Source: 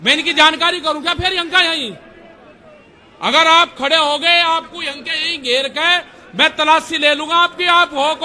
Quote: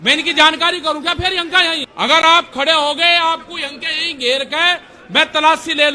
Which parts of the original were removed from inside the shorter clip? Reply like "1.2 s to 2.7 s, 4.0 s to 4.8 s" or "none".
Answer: 1.9 s to 3.1 s